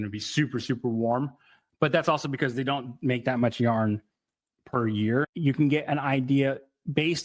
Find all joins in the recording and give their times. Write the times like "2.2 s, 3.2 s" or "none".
5.2 s